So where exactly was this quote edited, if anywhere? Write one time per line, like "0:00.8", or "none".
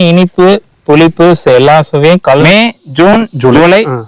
0:02.4